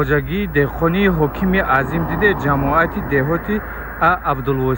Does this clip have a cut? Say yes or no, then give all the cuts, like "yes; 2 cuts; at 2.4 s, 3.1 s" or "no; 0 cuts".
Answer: no; 0 cuts